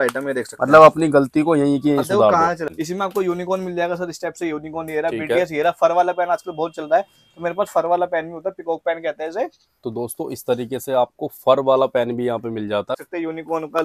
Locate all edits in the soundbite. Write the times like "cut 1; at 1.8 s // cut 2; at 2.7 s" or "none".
cut 1; at 2.7 s // cut 2; at 13.0 s